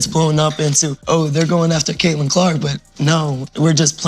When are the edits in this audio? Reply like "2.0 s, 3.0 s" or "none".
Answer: 0.9 s